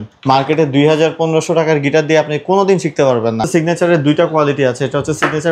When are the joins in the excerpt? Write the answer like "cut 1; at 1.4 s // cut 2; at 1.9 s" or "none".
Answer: cut 1; at 3.4 s